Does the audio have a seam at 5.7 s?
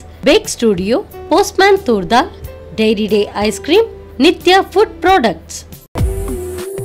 yes; 1 cut; at 5.7 s

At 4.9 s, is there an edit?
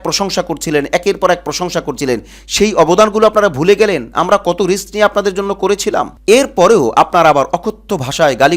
no; 1 cut; at 6.1 s

